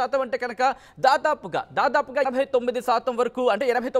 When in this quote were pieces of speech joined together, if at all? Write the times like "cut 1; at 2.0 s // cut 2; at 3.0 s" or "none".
cut 1; at 2.3 s